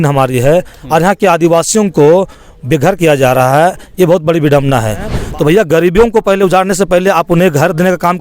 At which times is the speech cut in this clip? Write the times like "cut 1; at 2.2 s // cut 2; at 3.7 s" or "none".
cut 1; at 5.2 s